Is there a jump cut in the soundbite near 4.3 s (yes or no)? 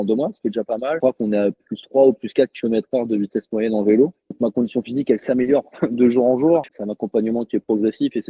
yes